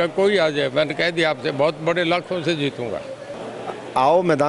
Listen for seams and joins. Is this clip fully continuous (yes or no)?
no